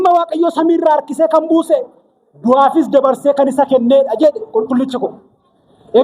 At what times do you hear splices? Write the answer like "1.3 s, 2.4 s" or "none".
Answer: none